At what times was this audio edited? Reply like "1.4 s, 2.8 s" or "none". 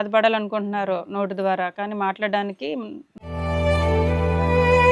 none